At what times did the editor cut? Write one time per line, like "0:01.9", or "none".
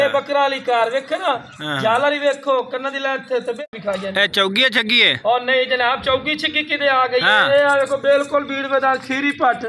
0:03.6